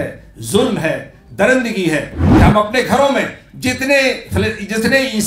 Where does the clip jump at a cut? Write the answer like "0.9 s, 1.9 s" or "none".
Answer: 2.2 s